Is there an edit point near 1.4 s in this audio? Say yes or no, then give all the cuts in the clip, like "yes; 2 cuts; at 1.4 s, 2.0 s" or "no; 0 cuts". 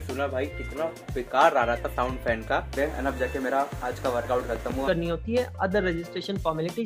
no; 2 cuts; at 2.8 s, 4.8 s